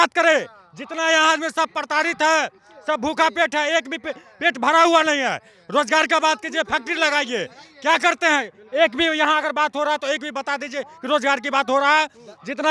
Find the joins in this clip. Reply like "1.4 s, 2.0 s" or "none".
none